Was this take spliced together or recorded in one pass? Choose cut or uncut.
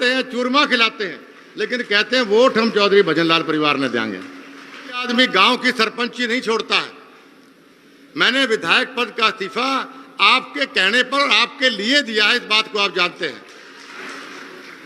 cut